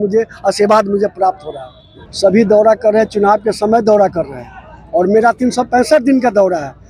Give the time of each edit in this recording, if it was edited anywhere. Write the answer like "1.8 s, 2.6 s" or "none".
2.1 s